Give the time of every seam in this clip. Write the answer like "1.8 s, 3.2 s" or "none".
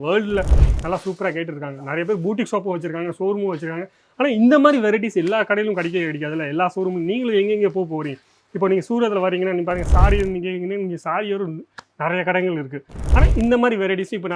none